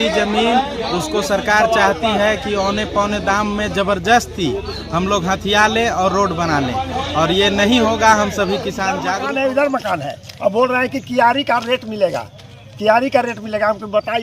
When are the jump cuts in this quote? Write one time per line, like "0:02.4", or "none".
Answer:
0:09.1